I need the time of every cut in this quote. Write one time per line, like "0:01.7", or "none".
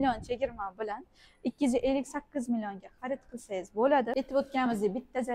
0:04.1